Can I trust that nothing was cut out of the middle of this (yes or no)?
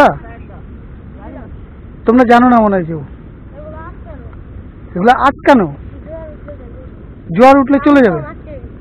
yes